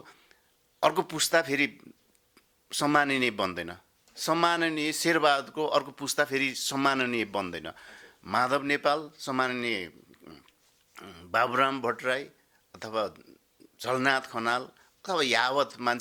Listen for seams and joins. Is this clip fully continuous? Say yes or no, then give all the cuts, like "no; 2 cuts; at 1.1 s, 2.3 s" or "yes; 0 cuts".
yes; 0 cuts